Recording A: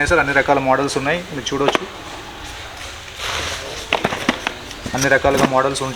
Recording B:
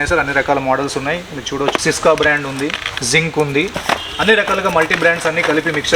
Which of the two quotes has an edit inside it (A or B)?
B